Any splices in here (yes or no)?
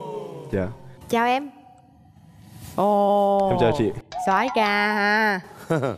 no